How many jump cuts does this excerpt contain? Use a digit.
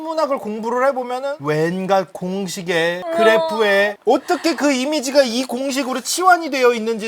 1